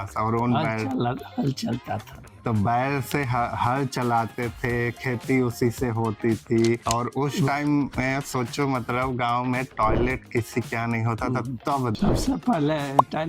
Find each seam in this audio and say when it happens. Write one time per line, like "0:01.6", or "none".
0:06.8
0:12.0